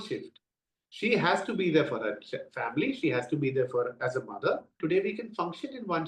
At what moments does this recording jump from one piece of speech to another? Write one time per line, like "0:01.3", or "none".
0:04.7